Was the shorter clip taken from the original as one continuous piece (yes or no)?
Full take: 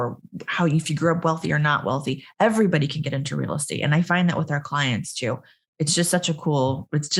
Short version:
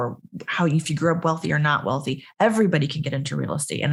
yes